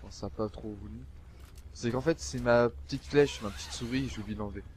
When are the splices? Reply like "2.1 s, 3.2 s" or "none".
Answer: none